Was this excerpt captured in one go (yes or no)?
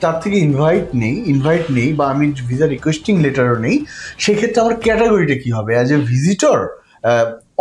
yes